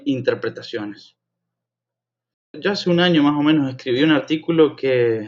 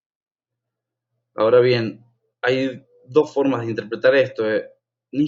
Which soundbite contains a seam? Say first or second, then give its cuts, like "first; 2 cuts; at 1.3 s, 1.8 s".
first; 1 cut; at 2.6 s